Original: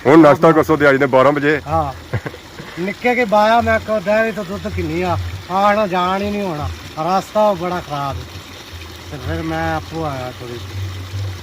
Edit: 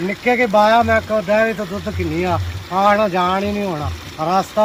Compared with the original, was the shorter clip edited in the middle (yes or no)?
no